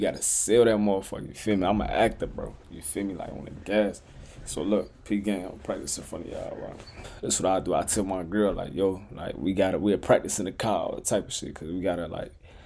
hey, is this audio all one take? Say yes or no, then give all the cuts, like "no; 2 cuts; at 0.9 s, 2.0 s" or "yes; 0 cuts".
no; 1 cut; at 7.1 s